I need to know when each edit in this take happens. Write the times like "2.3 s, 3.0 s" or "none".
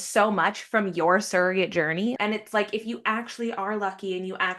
2.2 s